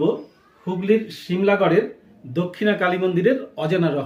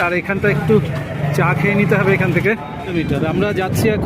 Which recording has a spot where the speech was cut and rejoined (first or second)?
second